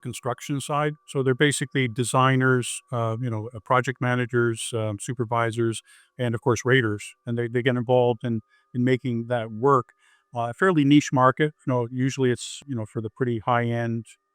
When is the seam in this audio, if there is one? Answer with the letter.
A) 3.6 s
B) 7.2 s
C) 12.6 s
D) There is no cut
C